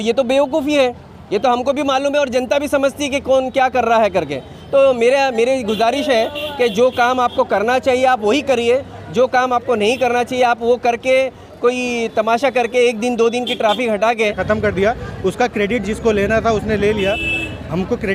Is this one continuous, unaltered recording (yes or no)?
no